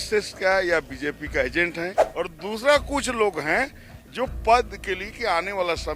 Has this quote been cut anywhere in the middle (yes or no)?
yes